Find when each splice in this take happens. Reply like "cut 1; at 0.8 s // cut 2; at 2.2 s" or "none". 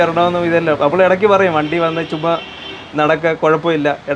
none

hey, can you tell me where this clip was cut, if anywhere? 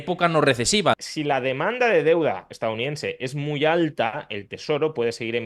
cut 1; at 1.0 s

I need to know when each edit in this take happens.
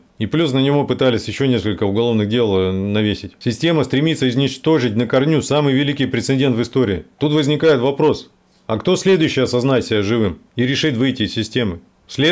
none

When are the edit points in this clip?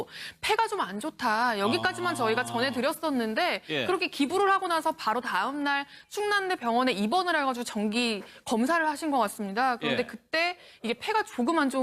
cut 1; at 3.0 s

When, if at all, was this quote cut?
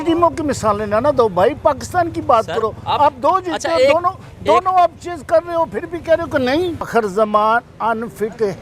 cut 1; at 6.9 s

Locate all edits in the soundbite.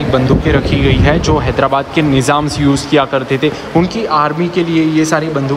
none

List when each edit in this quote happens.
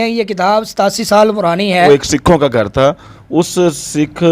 cut 1; at 1.8 s

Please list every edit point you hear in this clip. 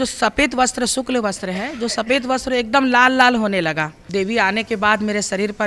cut 1; at 4.0 s

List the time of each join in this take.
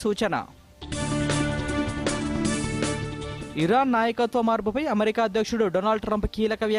none

